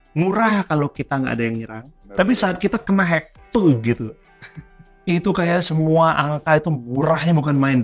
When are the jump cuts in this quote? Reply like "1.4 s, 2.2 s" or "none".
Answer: 2.0 s